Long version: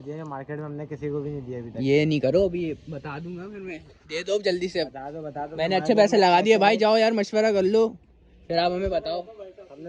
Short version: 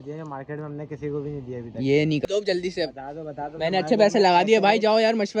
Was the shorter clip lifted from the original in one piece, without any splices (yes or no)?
no